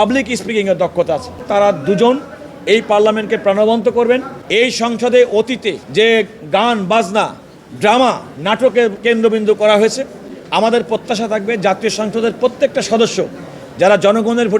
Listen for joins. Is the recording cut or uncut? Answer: cut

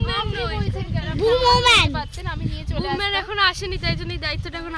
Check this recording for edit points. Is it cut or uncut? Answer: uncut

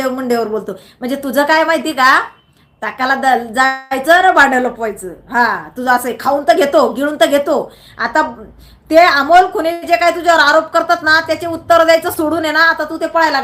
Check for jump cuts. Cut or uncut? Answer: uncut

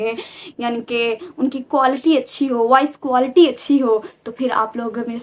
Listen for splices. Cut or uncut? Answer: uncut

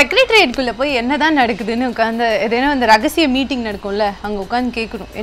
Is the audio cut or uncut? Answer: uncut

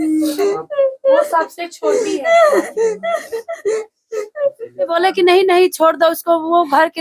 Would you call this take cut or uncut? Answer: cut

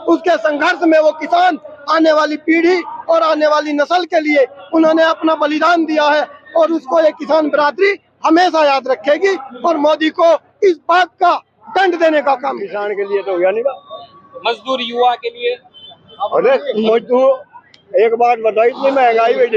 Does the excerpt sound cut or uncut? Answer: cut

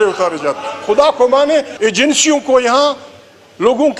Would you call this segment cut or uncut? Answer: cut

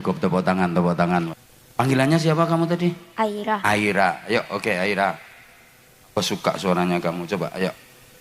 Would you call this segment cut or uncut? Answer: cut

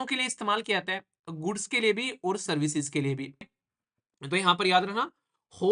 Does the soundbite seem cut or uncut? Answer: cut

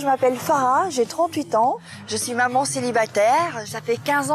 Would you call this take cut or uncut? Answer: cut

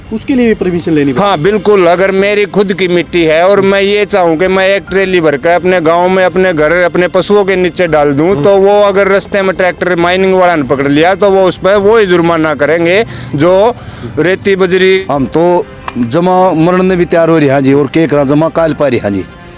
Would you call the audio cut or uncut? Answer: cut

